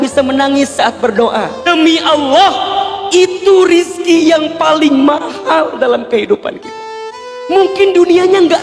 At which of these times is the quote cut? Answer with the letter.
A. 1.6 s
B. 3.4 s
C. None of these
A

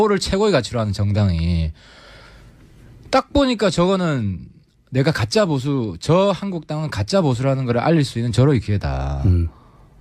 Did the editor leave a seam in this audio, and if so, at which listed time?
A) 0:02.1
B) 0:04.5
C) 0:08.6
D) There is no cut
D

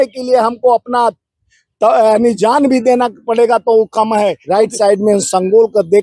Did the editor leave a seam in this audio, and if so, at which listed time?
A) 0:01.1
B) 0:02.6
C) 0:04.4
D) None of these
C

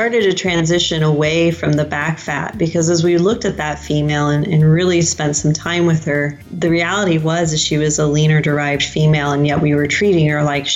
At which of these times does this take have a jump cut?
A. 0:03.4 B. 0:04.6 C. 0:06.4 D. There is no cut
C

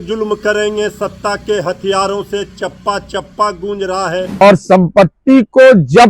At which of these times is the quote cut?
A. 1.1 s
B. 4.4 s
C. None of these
B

